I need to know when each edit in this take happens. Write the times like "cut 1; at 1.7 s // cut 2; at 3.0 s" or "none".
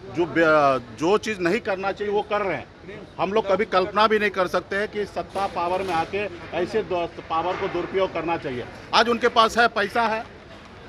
none

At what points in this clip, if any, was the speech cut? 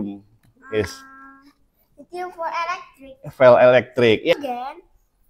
cut 1; at 4.3 s

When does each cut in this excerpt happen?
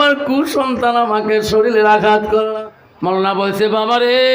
cut 1; at 2.5 s

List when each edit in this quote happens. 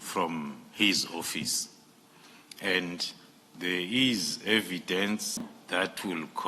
cut 1; at 5.6 s

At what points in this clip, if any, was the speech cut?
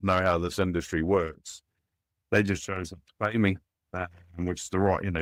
none

